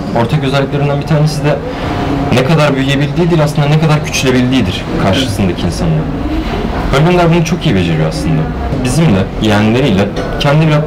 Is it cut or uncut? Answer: uncut